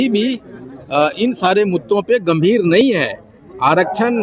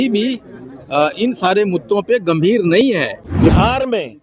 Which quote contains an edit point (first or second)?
second